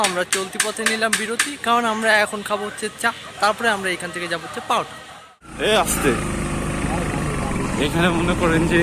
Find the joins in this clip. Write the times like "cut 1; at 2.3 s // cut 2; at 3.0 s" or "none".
cut 1; at 5.4 s